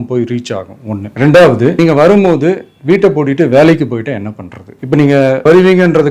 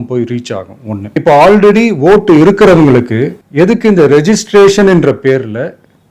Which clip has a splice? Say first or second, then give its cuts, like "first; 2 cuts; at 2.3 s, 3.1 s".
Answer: second; 1 cut; at 1.0 s